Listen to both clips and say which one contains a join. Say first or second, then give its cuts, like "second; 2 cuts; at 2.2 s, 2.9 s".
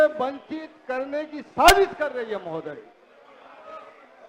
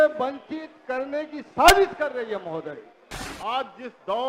second; 1 cut; at 3.2 s